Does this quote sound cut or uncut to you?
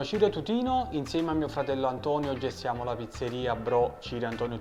uncut